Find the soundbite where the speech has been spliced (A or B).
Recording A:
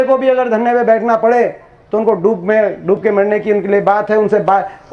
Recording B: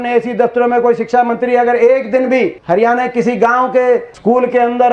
B